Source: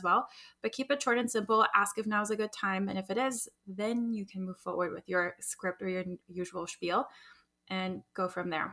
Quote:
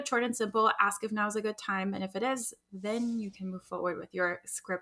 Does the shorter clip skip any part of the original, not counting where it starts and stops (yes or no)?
no